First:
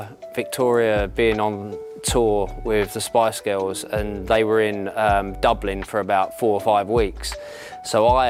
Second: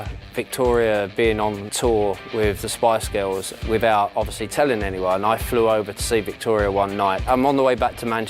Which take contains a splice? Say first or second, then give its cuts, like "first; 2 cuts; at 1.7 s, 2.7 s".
second; 3 cuts; at 1.7 s, 3.5 s, 7.2 s